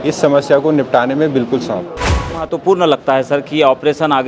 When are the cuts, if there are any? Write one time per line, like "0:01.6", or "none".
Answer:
0:02.3

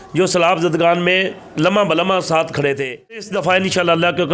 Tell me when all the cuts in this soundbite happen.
0:03.3

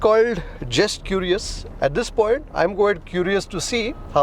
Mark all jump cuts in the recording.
0:01.7
0:02.5

